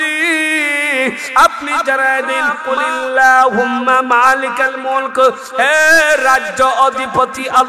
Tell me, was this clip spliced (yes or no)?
yes